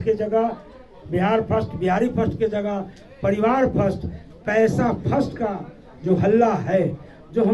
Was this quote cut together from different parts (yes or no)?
no